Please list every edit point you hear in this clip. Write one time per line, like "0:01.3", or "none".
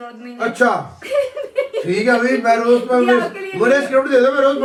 none